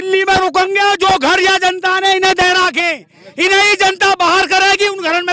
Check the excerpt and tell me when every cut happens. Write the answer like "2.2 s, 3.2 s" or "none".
none